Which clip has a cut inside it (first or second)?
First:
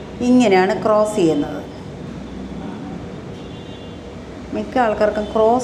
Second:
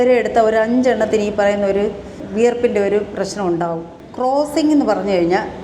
second